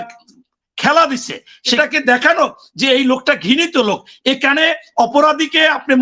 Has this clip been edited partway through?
yes; 1 cut; at 1.8 s

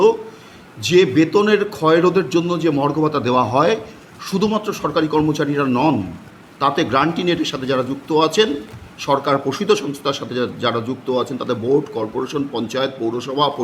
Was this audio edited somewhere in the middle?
no; 0 cuts

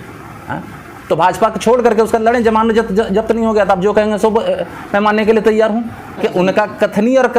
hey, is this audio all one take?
no; 1 cut; at 6.2 s

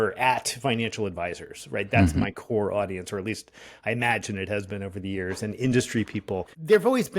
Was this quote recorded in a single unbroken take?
yes; 0 cuts

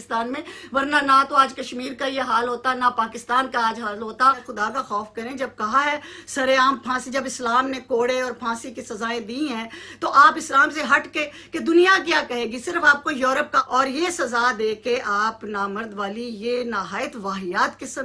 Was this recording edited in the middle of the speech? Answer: yes; 2 cuts; at 4.5 s, 13.6 s

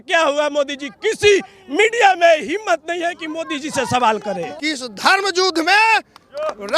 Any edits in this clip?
yes; 1 cut; at 4.5 s

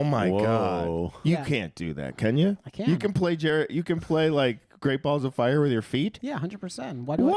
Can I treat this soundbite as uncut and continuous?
yes; 0 cuts

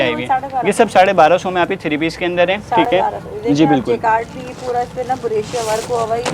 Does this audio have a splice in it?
no; 0 cuts

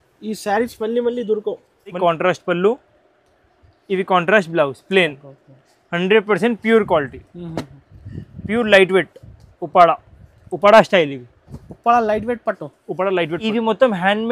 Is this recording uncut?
no; 2 cuts; at 2.0 s, 13.5 s

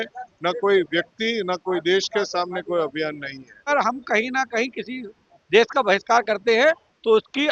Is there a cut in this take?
yes; 1 cut; at 3.6 s

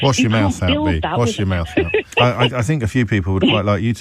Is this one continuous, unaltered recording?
no; 1 cut; at 2.2 s

